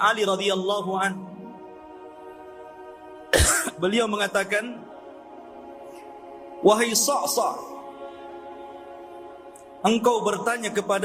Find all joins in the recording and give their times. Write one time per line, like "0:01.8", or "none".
none

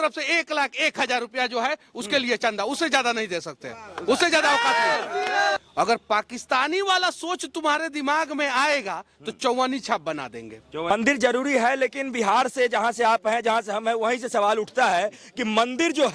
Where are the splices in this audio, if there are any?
0:05.6
0:10.9

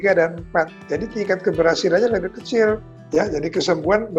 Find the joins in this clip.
0:02.9

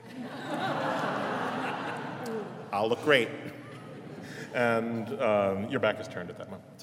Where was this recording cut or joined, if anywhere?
none

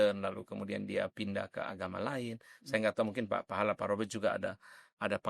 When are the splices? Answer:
none

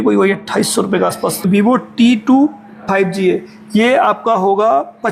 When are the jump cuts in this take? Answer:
0:01.5

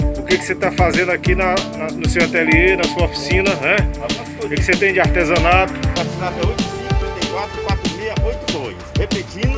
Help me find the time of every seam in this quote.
none

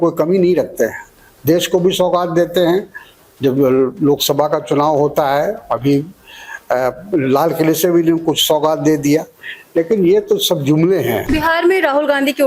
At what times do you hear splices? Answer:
0:11.2

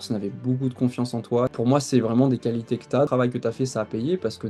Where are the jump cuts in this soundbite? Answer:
0:01.5
0:03.1

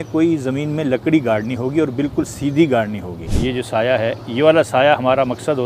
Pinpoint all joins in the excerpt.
0:03.3

